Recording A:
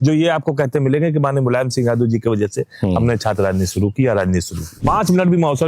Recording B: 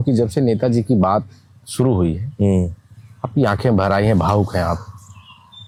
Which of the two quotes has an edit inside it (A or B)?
A